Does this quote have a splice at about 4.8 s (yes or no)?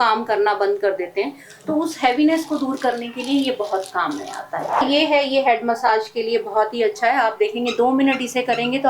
yes